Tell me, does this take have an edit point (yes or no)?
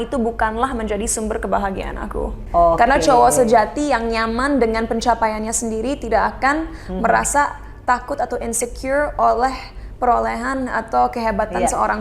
yes